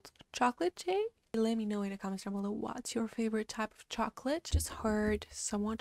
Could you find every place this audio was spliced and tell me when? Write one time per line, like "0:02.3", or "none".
0:01.2
0:04.5